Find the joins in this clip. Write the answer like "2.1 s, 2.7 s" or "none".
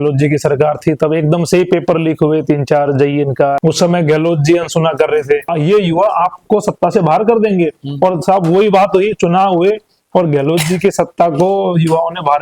3.6 s, 5.5 s

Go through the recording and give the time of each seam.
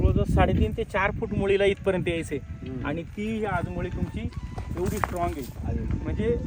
none

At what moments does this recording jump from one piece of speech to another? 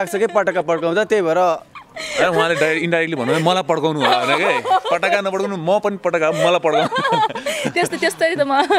none

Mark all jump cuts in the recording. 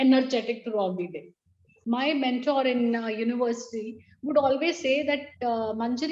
1.7 s

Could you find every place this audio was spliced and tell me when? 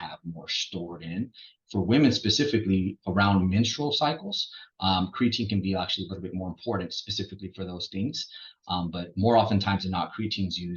1.5 s

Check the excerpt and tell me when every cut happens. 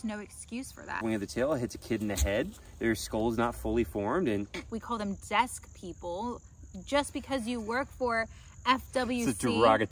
1.0 s, 4.7 s

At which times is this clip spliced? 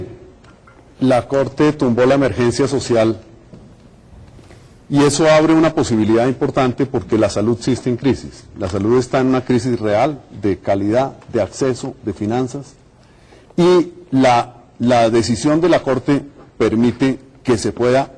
14.0 s

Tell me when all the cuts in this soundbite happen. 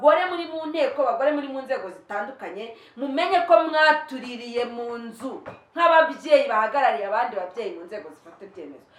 none

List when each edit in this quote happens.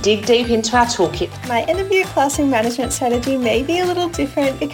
1.5 s

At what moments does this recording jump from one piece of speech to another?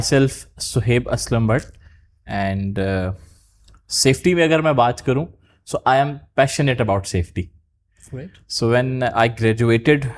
none

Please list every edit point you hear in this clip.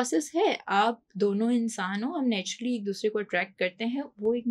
none

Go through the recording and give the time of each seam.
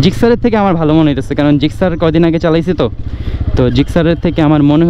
none

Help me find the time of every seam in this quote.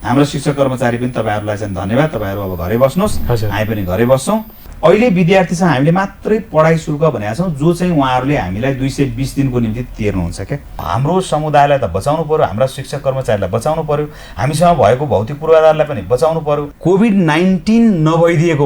4.6 s, 10.8 s, 16.7 s

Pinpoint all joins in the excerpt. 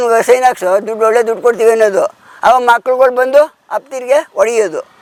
none

